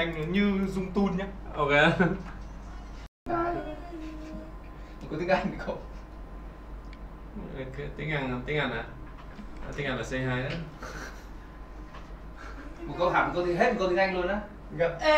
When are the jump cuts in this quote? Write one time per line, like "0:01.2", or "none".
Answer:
0:03.2